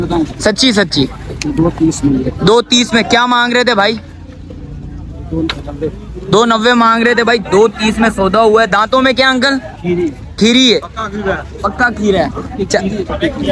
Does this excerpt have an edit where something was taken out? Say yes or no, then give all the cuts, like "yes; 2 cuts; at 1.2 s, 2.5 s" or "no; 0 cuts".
no; 0 cuts